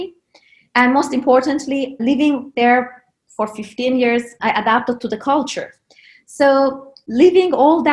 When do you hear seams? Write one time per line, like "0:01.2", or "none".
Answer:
none